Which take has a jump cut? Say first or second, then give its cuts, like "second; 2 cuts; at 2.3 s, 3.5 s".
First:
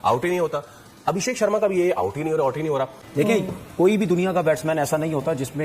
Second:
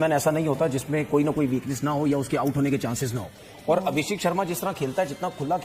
first; 1 cut; at 2.9 s